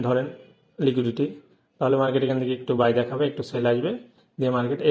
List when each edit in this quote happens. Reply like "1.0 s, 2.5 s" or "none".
none